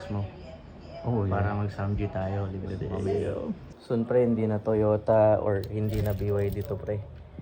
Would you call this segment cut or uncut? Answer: cut